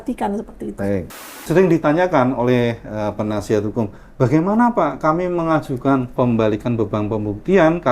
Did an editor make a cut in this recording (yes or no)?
yes